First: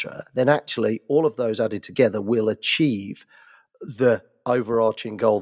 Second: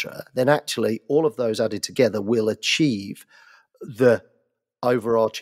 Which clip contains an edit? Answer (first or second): first